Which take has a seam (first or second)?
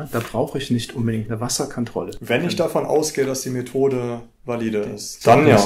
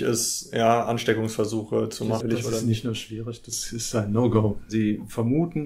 second